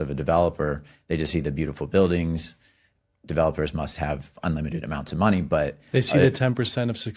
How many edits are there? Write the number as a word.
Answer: zero